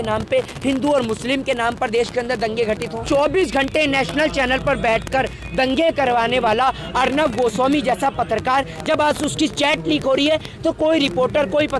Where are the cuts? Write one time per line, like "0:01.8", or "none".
0:03.0

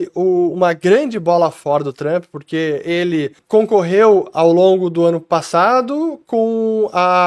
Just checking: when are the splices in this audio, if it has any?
none

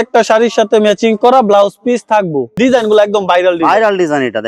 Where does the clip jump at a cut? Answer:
none

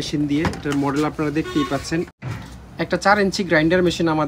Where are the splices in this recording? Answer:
0:02.1

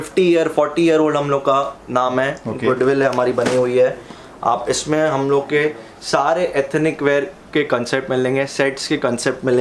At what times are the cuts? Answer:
none

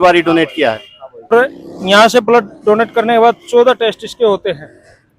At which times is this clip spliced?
0:01.3

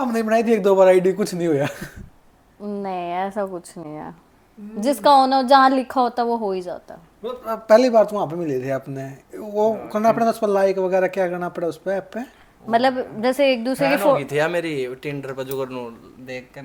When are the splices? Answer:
none

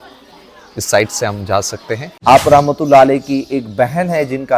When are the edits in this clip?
0:02.1

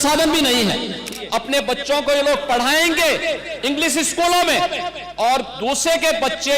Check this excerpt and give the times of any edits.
0:01.1

